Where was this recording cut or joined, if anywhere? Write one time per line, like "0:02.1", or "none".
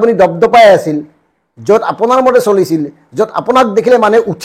none